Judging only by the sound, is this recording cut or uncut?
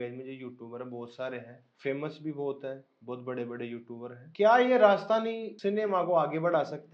cut